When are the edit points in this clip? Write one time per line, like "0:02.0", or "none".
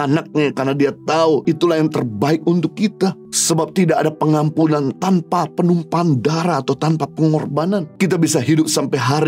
0:01.4
0:03.3
0:07.9

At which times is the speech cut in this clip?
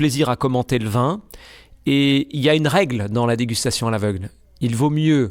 none

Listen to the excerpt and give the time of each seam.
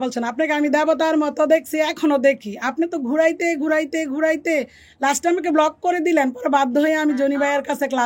none

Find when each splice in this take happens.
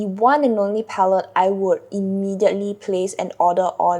none

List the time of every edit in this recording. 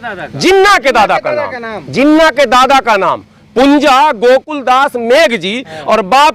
none

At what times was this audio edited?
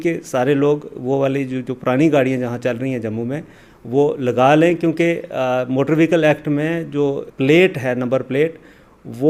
none

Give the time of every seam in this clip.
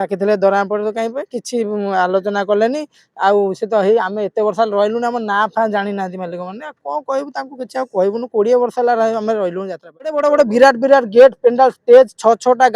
0:10.2

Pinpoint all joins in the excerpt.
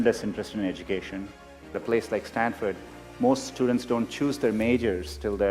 0:01.7

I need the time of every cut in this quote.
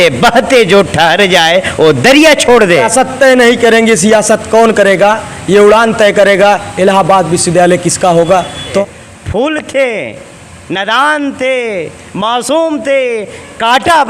0:02.9
0:08.8

